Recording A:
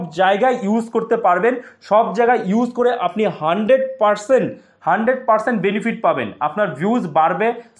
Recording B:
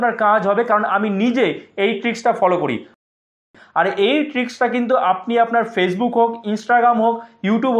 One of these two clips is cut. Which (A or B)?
B